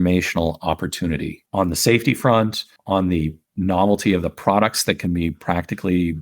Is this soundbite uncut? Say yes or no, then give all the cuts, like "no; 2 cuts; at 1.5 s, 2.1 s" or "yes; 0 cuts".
no; 3 cuts; at 1.4 s, 2.7 s, 3.4 s